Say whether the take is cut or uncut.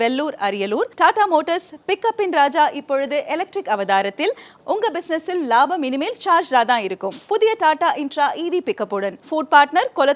uncut